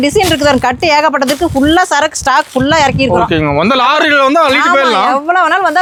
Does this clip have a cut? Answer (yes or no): no